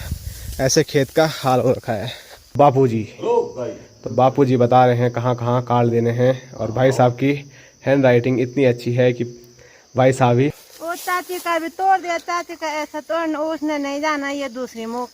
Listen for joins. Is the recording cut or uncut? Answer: cut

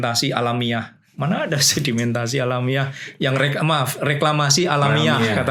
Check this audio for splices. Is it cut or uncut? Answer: uncut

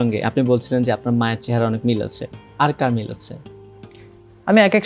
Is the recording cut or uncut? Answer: uncut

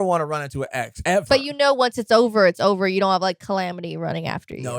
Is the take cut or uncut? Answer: cut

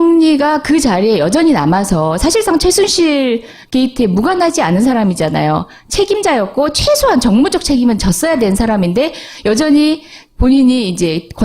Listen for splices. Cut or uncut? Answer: cut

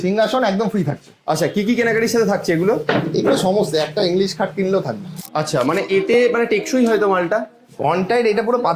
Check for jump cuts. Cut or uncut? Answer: cut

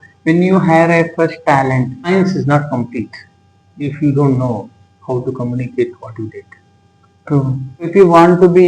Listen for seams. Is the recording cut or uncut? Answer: cut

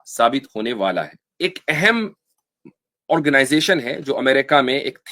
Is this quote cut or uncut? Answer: cut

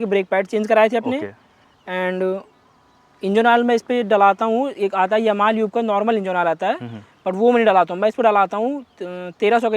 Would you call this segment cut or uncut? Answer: uncut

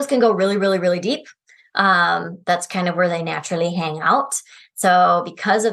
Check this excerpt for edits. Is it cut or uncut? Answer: uncut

